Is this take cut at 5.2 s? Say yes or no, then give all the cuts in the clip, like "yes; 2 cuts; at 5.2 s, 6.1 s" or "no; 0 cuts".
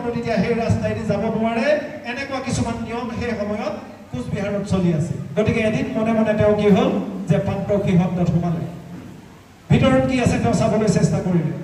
yes; 1 cut; at 5.2 s